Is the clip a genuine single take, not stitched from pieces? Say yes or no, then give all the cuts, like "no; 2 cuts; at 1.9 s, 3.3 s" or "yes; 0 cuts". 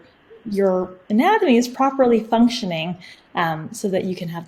no; 1 cut; at 1.7 s